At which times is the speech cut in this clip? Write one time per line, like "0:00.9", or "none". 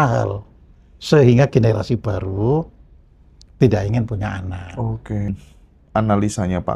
0:05.3